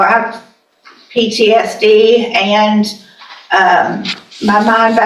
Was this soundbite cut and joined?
no; 0 cuts

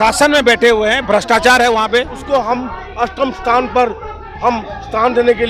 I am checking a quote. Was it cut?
yes; 1 cut; at 2.2 s

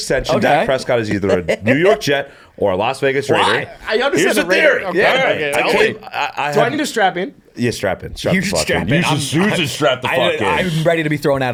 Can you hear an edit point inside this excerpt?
no; 0 cuts

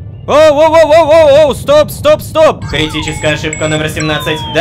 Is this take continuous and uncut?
yes; 0 cuts

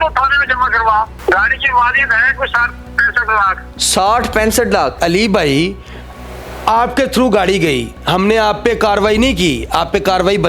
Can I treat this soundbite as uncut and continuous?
no; 2 cuts; at 1.1 s, 5.0 s

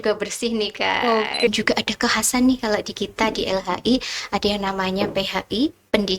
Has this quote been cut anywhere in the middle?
yes; 1 cut; at 1.5 s

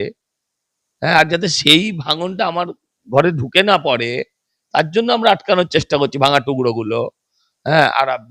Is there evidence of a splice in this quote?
no; 0 cuts

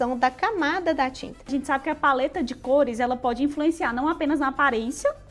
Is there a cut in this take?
yes; 1 cut; at 1.5 s

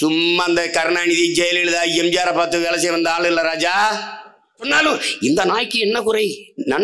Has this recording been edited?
yes; 1 cut; at 4.7 s

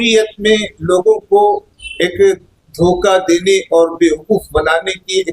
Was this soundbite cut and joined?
no; 0 cuts

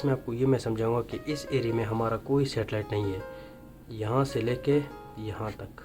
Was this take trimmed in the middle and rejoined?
no; 0 cuts

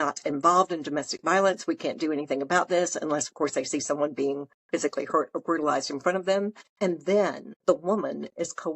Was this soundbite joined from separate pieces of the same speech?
yes; 2 cuts; at 6.6 s, 7.5 s

